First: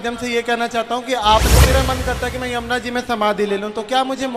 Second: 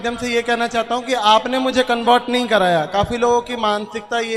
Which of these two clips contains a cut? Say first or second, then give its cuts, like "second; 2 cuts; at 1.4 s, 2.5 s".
first; 1 cut; at 1.5 s